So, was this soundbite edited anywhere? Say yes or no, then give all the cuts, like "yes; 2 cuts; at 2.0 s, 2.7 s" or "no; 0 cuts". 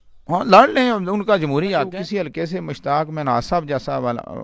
yes; 1 cut; at 1.9 s